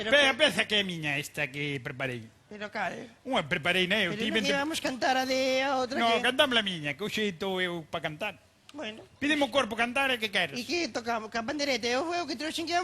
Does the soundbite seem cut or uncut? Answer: cut